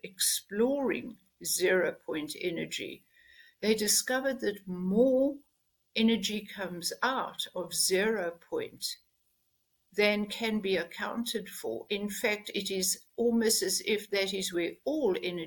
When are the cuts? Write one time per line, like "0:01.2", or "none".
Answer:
none